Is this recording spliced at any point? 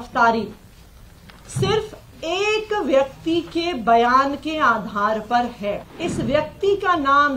yes; 1 cut; at 5.9 s

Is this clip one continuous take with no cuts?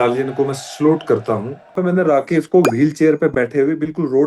no; 1 cut; at 1.8 s

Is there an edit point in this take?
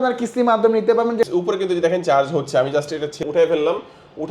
yes; 2 cuts; at 1.3 s, 3.2 s

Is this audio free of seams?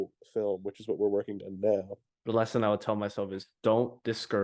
no; 1 cut; at 2.0 s

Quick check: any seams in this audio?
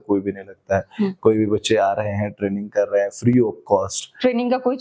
no; 0 cuts

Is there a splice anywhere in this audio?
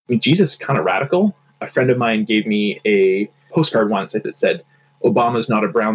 yes; 3 cuts; at 1.5 s, 3.4 s, 4.2 s

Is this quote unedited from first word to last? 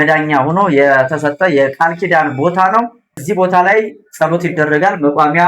no; 1 cut; at 3.2 s

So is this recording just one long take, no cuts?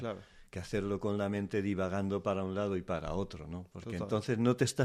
yes; 0 cuts

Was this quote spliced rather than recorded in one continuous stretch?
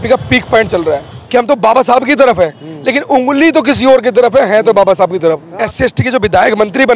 yes; 2 cuts; at 1.1 s, 5.5 s

